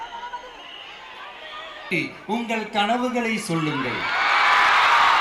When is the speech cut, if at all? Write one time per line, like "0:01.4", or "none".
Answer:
0:01.9